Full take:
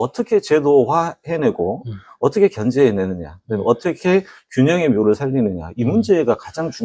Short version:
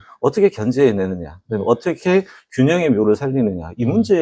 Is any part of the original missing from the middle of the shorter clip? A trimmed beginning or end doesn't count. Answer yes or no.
no